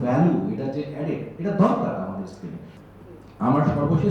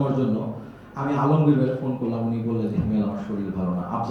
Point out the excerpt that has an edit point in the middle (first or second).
first